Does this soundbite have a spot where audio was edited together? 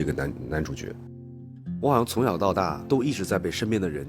yes; 2 cuts; at 1.1 s, 2.8 s

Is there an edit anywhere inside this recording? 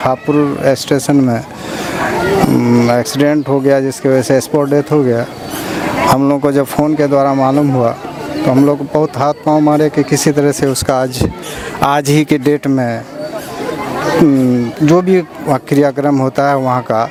no; 0 cuts

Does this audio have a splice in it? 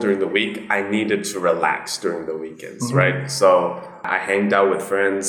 yes; 1 cut; at 4.0 s

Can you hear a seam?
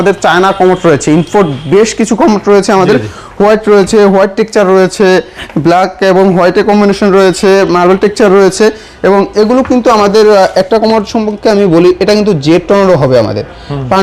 no; 0 cuts

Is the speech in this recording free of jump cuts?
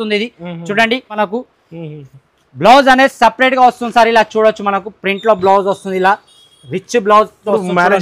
no; 1 cut; at 1.2 s

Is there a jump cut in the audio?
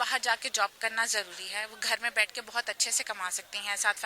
no; 0 cuts

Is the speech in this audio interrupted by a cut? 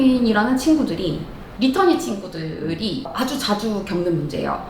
yes; 1 cut; at 1.4 s

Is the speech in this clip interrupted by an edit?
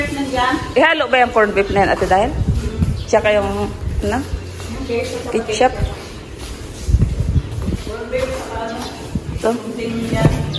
no; 0 cuts

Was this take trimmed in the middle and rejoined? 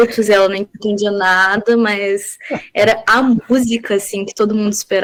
no; 0 cuts

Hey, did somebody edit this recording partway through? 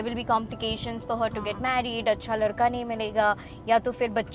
no; 0 cuts

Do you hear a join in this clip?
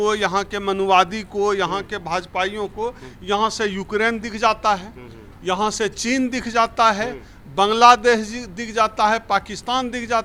no; 0 cuts

